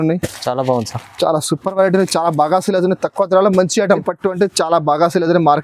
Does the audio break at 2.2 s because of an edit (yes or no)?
no